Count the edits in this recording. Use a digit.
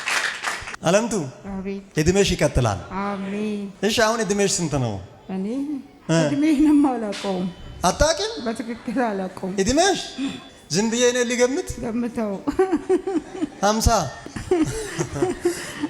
1